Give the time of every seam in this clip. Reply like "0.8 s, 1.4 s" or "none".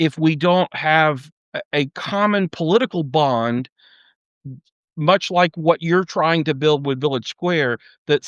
none